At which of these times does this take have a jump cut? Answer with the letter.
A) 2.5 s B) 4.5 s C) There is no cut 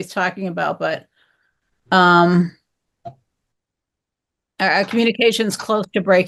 C